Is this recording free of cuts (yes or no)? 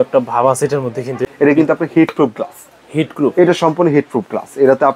no